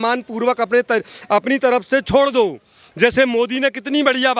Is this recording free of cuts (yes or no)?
yes